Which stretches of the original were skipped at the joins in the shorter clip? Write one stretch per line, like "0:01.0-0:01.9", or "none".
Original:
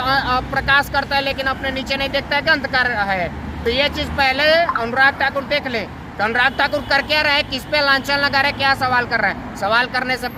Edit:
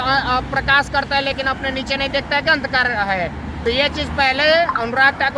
none